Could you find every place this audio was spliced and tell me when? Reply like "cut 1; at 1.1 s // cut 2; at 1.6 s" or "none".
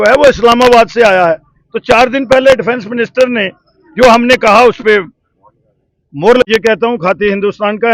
cut 1; at 6.5 s